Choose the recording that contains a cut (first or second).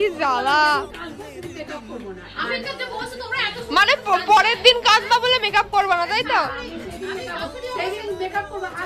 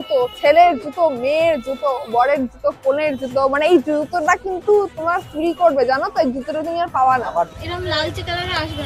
second